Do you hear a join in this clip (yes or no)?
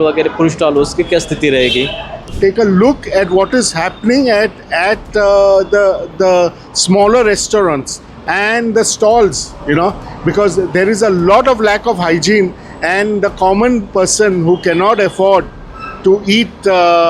yes